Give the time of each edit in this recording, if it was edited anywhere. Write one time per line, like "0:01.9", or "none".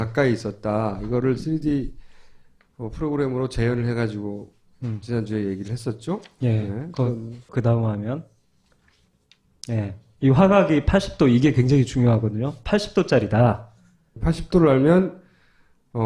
none